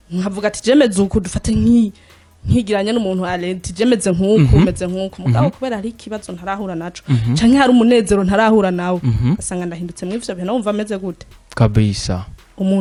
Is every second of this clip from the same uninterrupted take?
yes; 0 cuts

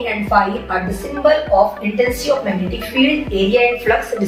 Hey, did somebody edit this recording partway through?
no; 0 cuts

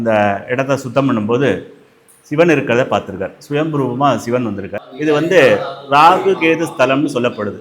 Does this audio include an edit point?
yes; 1 cut; at 4.8 s

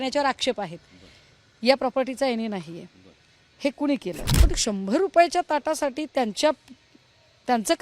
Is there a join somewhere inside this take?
yes; 1 cut; at 4.3 s

